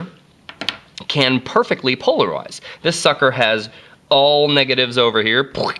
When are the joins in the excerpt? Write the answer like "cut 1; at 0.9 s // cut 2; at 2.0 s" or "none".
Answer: cut 1; at 2.7 s